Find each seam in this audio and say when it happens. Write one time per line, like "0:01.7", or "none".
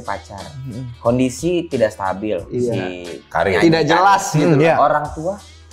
none